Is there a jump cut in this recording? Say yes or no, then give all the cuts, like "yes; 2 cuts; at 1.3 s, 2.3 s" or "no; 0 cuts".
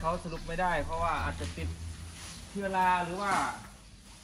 no; 0 cuts